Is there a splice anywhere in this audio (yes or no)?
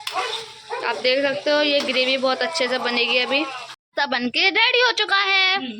yes